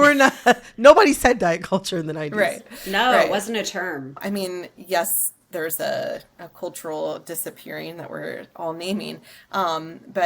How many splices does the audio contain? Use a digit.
1